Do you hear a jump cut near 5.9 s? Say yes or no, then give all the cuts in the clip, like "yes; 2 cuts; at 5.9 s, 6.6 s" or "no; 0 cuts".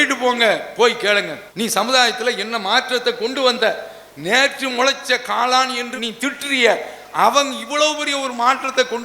yes; 1 cut; at 5.9 s